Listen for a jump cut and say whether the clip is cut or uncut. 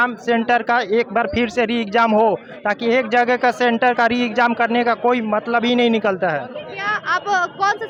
uncut